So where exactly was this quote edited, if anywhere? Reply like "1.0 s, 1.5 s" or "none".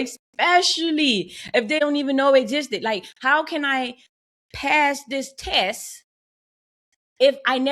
1.8 s